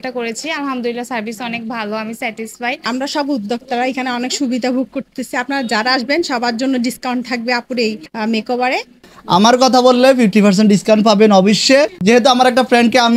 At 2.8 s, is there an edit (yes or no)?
yes